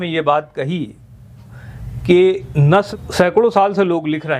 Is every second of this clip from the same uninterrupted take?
no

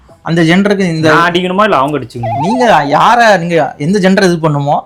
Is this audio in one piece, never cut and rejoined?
yes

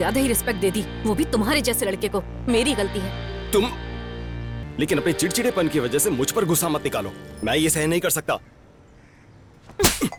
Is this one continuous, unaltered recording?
yes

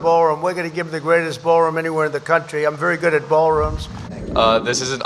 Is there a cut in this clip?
yes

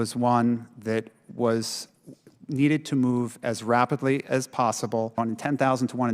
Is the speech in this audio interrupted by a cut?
yes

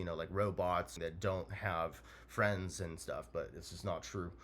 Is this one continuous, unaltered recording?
no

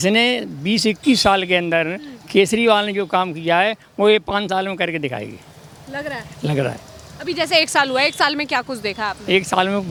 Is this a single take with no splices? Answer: yes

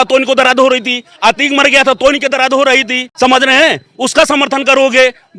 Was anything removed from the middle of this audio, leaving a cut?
yes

